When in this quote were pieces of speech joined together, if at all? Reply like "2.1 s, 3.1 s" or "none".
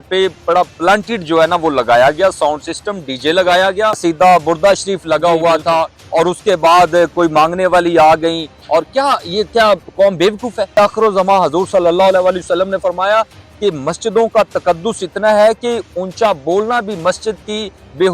4.0 s, 10.8 s